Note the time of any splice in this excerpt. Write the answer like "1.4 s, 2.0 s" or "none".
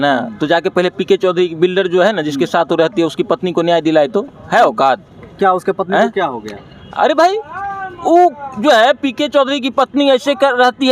none